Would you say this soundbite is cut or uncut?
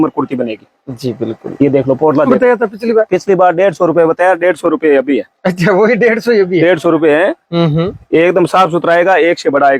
cut